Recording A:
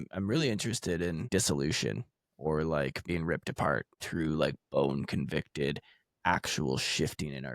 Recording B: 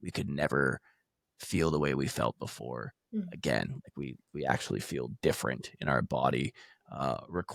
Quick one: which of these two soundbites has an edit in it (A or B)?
A